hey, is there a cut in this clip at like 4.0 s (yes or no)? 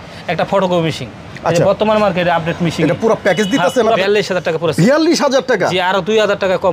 yes